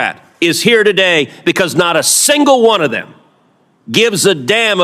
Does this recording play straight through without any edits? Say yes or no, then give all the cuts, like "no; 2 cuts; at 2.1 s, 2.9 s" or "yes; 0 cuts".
yes; 0 cuts